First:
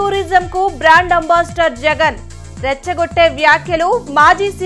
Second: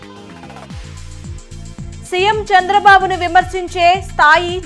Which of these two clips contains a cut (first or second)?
second